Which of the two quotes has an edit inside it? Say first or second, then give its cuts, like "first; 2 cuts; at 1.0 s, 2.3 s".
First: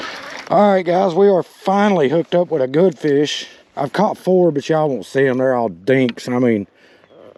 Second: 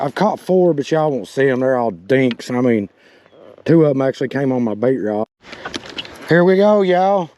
second; 1 cut; at 5.2 s